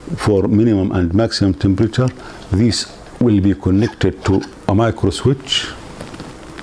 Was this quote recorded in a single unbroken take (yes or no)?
yes